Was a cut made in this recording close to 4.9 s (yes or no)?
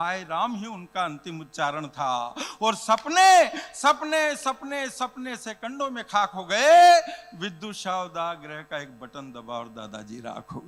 no